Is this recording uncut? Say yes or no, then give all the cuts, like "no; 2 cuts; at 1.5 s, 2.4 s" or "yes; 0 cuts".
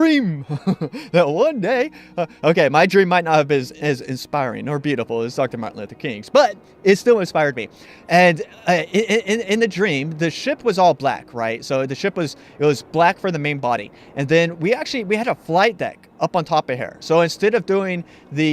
no; 1 cut; at 10.1 s